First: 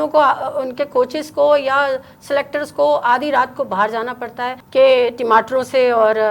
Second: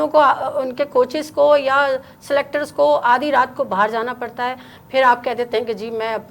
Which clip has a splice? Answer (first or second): first